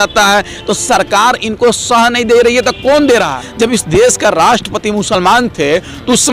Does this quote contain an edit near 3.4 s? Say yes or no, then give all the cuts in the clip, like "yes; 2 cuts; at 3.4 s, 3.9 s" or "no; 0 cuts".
yes; 1 cut; at 3.4 s